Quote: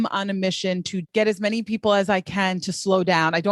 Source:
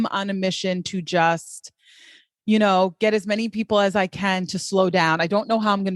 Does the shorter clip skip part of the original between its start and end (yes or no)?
yes